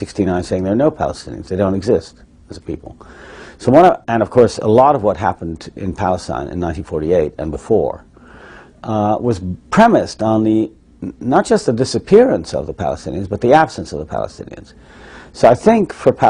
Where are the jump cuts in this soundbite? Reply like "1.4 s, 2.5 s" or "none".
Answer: 3.8 s